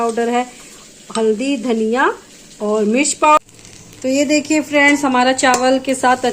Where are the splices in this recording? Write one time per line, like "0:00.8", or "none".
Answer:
0:03.4

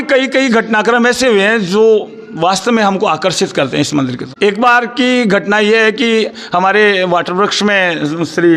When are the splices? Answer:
0:04.2

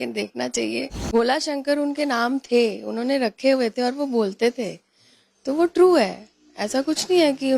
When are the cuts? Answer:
0:01.0

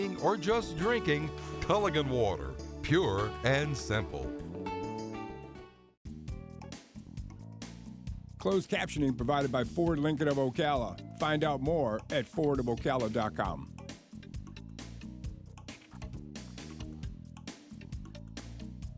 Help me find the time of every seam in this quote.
0:05.9

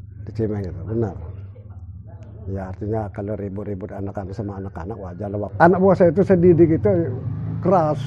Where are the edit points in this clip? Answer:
0:05.5

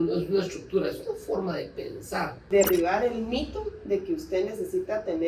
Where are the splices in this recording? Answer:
0:02.4

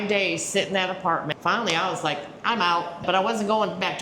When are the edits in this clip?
0:01.3
0:03.0

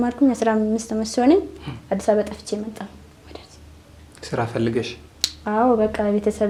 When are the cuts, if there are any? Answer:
none

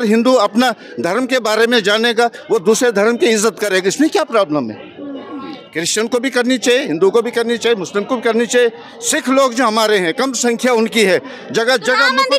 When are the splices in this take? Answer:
none

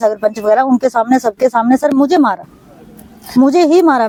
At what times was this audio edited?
none

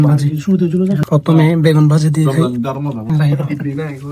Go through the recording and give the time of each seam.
0:01.0
0:03.1

